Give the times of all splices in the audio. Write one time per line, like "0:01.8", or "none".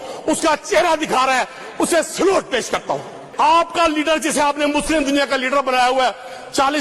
0:03.2